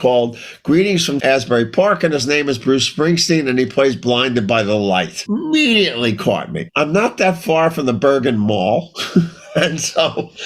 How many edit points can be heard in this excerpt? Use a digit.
3